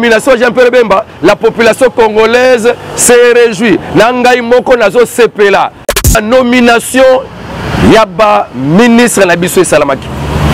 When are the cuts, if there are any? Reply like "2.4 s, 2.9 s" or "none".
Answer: 6.0 s